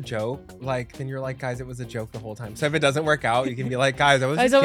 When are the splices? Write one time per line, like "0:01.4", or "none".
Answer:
none